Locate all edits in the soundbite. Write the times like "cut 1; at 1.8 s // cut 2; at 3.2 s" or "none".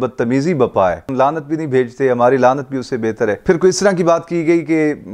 cut 1; at 1.1 s // cut 2; at 3.4 s